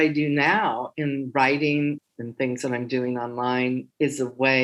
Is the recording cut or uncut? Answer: cut